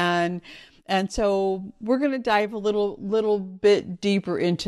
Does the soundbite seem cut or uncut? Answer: uncut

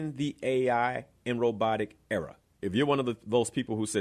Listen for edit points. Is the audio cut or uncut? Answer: cut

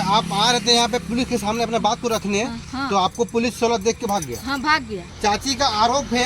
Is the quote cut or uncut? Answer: cut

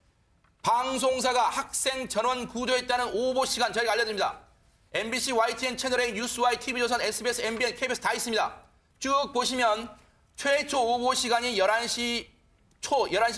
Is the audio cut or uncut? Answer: uncut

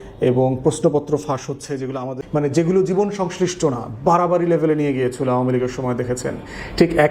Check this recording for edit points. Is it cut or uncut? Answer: cut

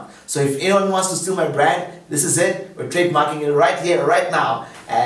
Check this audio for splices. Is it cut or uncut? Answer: uncut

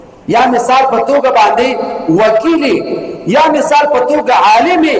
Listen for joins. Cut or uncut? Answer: uncut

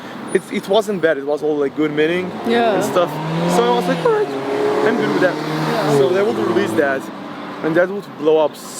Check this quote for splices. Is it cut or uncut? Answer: uncut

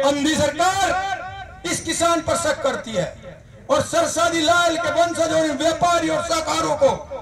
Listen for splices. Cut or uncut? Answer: uncut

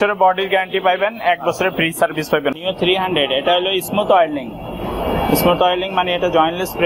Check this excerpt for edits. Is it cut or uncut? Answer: cut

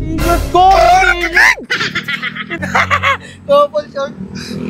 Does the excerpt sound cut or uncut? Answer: cut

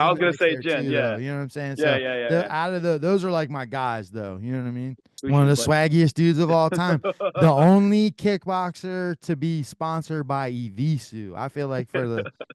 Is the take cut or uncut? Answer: cut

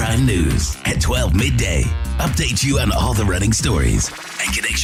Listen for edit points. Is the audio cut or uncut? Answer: uncut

